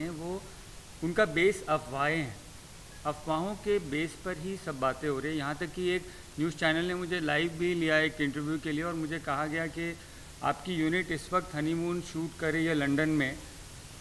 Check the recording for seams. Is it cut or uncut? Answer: uncut